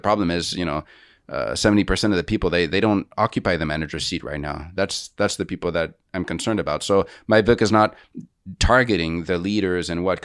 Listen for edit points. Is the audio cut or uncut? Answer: uncut